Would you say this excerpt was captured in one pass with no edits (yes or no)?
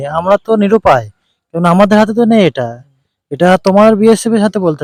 yes